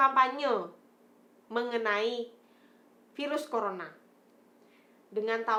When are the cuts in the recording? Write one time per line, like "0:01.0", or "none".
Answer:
none